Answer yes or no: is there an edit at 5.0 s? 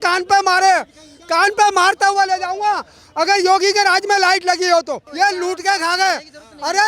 yes